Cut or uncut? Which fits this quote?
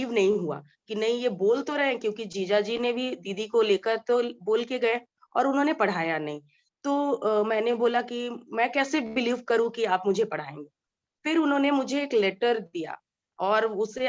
uncut